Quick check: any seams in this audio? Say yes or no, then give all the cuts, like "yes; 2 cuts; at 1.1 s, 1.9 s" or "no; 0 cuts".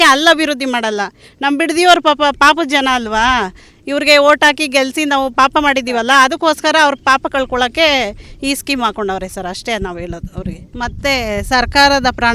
no; 0 cuts